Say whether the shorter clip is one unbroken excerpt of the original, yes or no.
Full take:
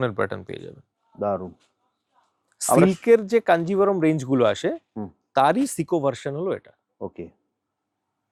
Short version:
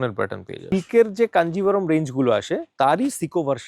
no